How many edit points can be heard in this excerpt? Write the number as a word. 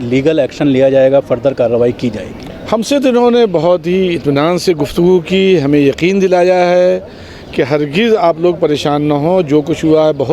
zero